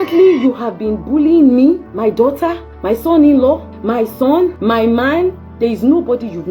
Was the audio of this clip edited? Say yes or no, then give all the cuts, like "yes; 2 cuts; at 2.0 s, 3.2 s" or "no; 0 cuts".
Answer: yes; 4 cuts; at 1.9 s, 2.7 s, 3.7 s, 4.6 s